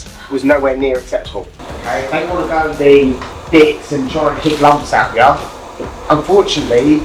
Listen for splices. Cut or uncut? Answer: cut